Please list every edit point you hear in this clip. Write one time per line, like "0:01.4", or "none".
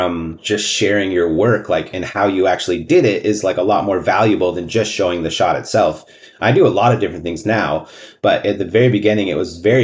none